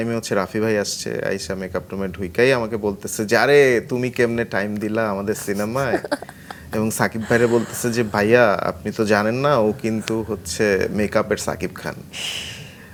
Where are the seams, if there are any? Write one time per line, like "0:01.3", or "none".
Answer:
none

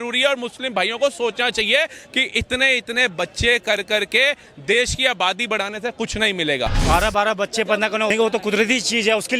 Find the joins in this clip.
0:06.8
0:08.1

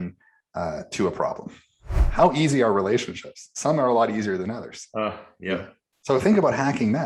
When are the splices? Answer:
0:02.0

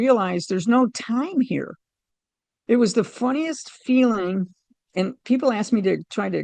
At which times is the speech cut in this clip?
none

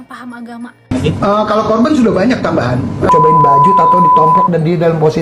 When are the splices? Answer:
0:03.1

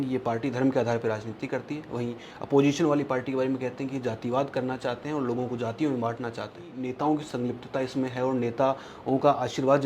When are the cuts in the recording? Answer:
0:06.7

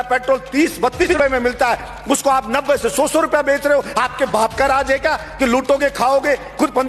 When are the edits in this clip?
0:01.0

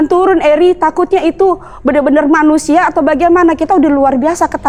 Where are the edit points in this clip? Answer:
none

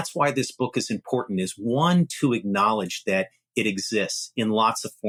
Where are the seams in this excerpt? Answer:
none

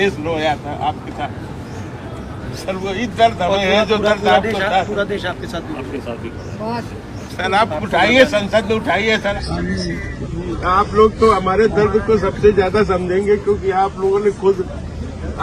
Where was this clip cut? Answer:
0:09.3

